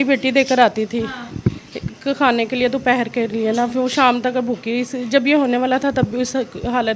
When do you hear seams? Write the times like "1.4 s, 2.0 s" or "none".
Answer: none